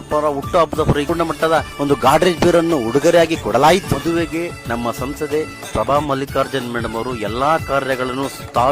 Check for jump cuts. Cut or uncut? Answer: cut